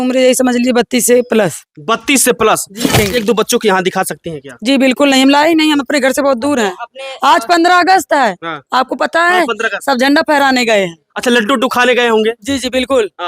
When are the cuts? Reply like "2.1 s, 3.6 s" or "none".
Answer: 2.9 s